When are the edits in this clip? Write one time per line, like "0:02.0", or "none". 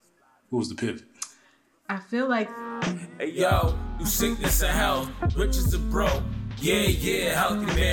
0:02.6